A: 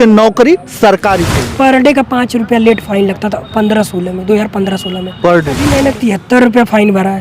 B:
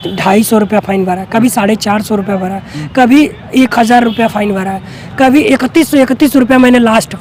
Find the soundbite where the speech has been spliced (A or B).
A